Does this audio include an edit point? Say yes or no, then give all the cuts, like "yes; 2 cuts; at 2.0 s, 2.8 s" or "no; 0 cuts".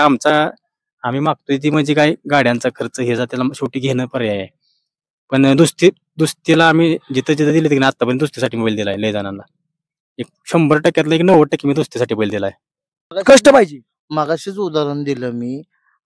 no; 0 cuts